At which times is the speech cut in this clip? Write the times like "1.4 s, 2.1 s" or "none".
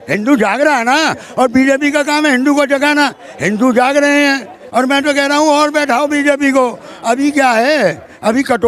none

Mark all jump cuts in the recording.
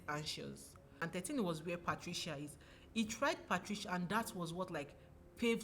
1.0 s

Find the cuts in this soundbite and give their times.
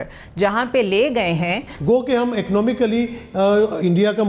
1.8 s

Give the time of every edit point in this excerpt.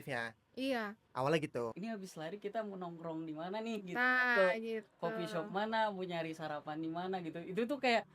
1.8 s

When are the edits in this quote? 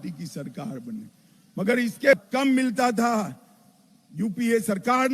2.1 s

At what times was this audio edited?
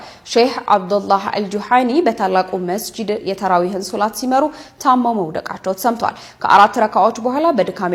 none

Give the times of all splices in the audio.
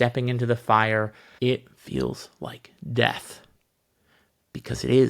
1.2 s

